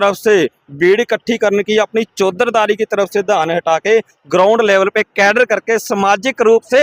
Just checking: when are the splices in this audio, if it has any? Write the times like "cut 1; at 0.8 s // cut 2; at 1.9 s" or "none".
none